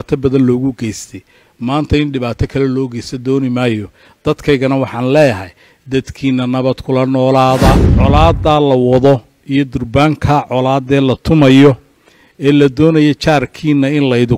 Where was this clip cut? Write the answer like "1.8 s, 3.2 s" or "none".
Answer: 7.9 s